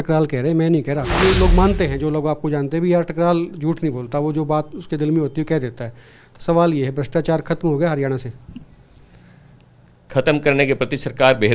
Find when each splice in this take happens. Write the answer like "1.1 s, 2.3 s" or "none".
1.1 s